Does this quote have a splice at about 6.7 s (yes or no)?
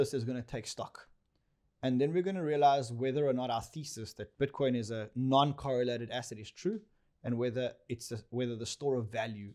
no